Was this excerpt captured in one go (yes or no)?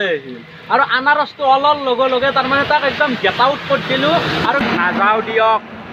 no